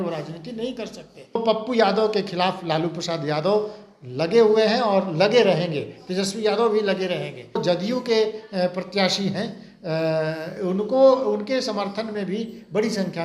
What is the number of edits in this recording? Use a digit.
2